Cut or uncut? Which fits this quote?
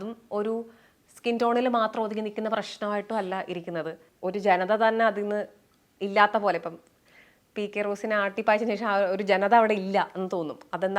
cut